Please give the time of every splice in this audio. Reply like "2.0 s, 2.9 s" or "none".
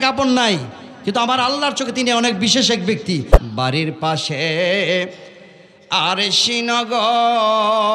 3.3 s